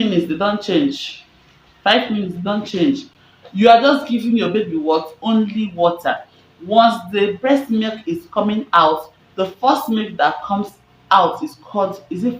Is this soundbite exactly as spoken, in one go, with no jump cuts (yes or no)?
yes